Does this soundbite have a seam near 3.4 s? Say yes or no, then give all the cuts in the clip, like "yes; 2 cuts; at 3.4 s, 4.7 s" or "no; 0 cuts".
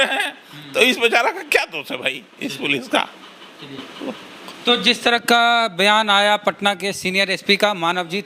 no; 0 cuts